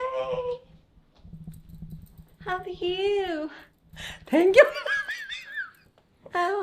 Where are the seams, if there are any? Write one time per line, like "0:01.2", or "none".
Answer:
none